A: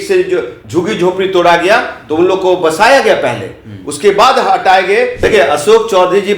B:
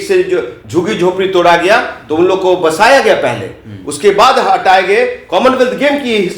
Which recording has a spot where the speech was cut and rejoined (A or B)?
A